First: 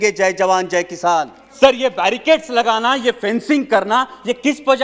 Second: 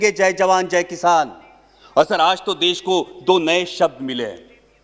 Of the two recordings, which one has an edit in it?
first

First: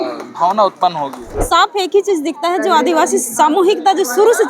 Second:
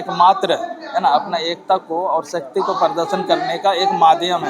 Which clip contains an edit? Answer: first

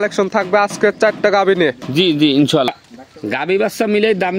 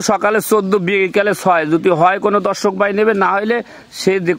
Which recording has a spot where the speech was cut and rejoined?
first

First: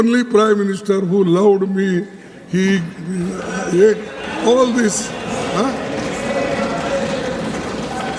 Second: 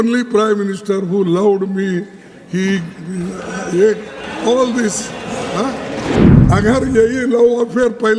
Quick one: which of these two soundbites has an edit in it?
second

